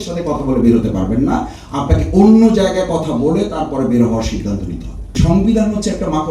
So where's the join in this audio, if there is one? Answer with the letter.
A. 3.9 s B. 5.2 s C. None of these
B